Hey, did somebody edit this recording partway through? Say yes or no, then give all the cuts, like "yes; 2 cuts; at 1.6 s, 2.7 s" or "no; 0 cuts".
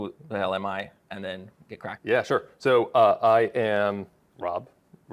no; 0 cuts